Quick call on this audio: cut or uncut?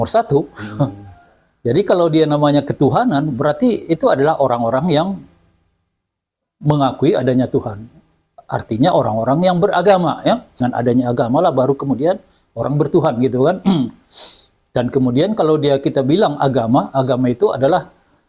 cut